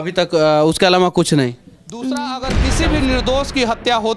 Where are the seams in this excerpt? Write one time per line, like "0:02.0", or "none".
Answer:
0:02.6